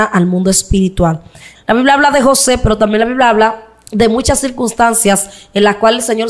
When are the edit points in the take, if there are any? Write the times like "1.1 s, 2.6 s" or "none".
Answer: 1.4 s